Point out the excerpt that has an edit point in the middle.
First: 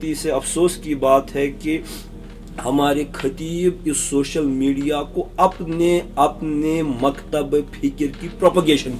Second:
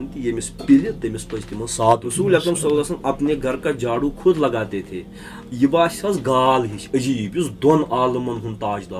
second; 1 cut; at 2.1 s

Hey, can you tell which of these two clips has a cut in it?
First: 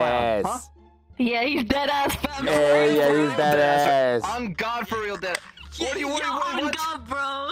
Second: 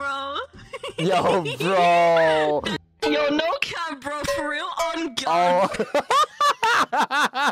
second; 1 cut; at 2.7 s

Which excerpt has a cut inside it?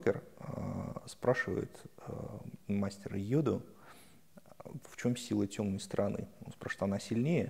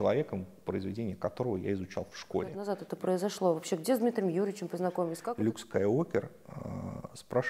second; 2 cuts; at 2.7 s, 5.2 s

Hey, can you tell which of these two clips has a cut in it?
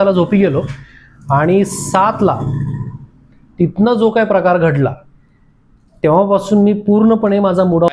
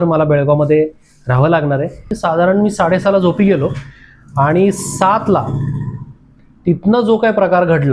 second; 1 cut; at 2.2 s

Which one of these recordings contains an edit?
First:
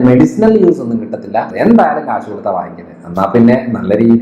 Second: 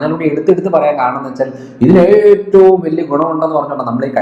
first; 1 cut; at 1.5 s

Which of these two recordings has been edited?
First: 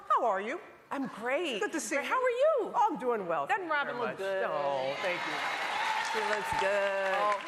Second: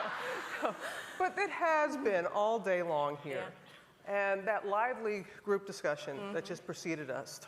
second; 1 cut; at 6.3 s

